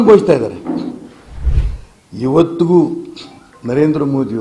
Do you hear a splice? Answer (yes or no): yes